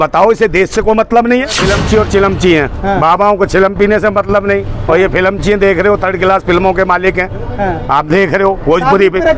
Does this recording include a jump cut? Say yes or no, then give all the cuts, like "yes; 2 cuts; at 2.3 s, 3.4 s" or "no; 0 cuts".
yes; 1 cut; at 1.6 s